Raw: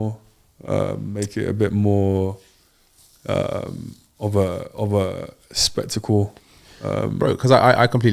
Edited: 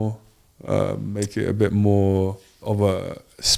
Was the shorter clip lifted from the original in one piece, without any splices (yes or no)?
no